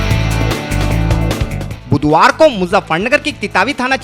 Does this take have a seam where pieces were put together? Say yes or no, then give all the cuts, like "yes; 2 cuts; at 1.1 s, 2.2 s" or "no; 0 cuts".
no; 0 cuts